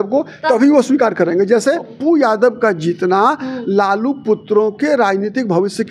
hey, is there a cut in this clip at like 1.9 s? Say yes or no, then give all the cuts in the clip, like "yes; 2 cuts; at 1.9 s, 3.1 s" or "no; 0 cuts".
yes; 1 cut; at 1.9 s